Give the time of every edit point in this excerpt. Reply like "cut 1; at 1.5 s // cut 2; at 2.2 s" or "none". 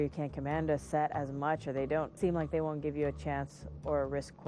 cut 1; at 2.2 s

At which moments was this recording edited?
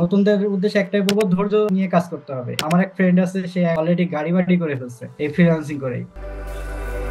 cut 1; at 2.5 s // cut 2; at 6.1 s

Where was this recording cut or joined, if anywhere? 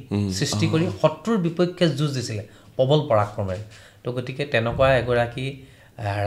none

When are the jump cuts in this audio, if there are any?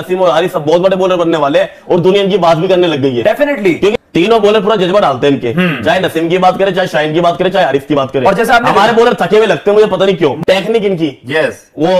cut 1; at 4.0 s // cut 2; at 10.4 s

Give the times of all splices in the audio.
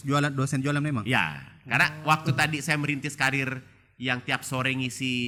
none

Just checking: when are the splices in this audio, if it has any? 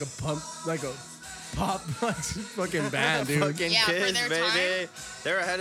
cut 1; at 3.6 s

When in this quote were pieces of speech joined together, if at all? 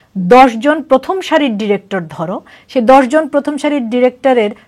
none

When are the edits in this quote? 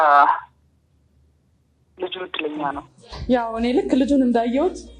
cut 1; at 2.9 s

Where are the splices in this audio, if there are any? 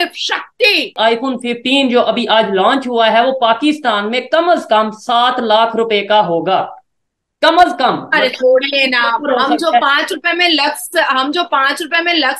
cut 1; at 0.9 s

